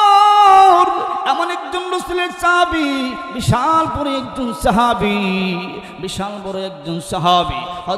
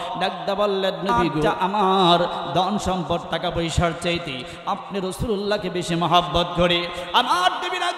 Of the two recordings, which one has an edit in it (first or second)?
second